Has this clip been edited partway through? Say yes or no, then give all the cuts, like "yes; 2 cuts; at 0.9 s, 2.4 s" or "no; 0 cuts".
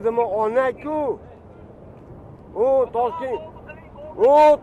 no; 0 cuts